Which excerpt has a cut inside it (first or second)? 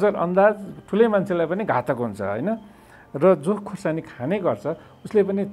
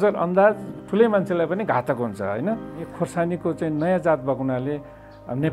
second